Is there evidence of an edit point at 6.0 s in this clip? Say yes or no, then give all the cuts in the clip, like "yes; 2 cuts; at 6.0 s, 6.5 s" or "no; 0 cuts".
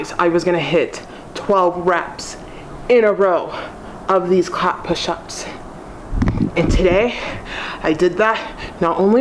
no; 0 cuts